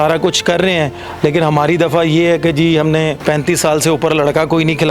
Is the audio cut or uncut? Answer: cut